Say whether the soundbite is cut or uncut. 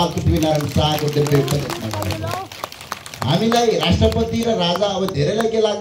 uncut